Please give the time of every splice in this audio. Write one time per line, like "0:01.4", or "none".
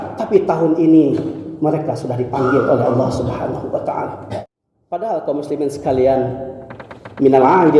0:04.4